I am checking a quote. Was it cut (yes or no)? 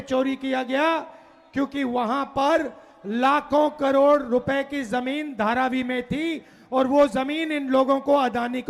no